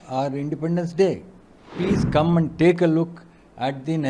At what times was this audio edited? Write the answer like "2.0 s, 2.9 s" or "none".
1.7 s